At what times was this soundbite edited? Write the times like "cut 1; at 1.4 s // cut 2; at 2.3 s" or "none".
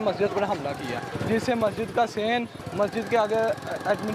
cut 1; at 1.1 s // cut 2; at 2.6 s